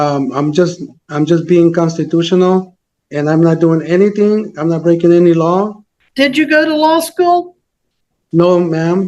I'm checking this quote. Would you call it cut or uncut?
cut